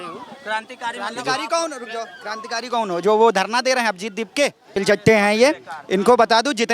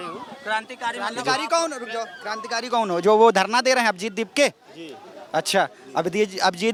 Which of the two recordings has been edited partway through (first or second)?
first